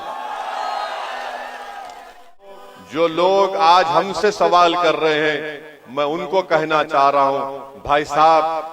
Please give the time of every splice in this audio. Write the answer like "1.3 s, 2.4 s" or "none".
2.4 s